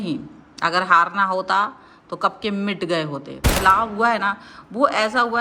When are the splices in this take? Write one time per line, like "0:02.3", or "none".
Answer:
0:03.6